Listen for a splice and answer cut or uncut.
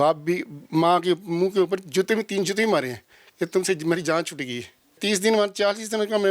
cut